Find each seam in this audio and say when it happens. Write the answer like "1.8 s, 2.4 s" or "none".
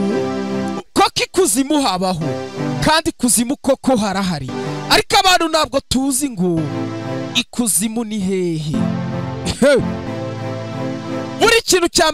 10.1 s